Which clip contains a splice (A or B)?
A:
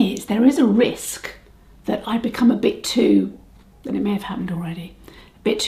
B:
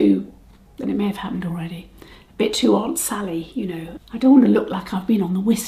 B